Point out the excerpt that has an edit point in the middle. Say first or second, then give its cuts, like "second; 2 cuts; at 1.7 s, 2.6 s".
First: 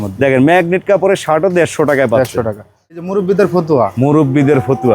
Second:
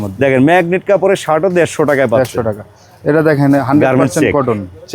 first; 1 cut; at 3.0 s